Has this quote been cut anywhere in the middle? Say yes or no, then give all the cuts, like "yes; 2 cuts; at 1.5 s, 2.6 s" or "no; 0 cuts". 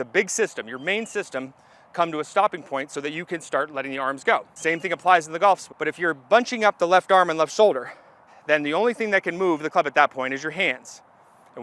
yes; 3 cuts; at 4.5 s, 5.7 s, 8.3 s